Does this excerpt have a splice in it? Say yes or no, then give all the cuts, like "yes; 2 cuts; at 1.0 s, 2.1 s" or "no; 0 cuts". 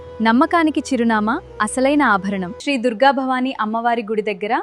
yes; 1 cut; at 2.5 s